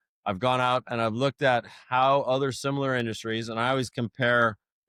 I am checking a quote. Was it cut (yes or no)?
no